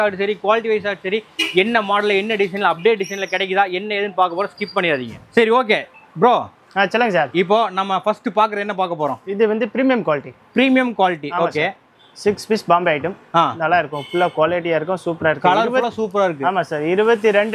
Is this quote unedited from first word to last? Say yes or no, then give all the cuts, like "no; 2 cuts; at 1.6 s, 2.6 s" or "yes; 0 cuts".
yes; 0 cuts